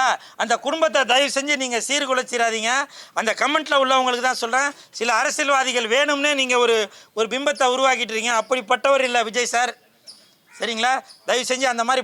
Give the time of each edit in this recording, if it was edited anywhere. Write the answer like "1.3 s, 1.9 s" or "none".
none